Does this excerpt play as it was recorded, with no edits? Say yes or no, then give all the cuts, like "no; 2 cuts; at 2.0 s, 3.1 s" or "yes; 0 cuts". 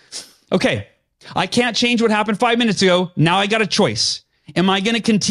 yes; 0 cuts